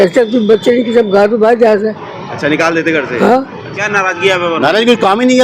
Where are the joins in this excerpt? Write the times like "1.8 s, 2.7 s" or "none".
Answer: 3.7 s